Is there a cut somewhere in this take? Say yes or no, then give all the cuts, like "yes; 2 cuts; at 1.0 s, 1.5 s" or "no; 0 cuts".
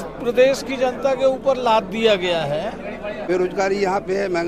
yes; 1 cut; at 3.2 s